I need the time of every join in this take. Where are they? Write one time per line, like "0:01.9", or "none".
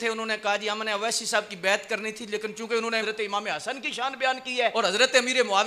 0:03.0
0:04.7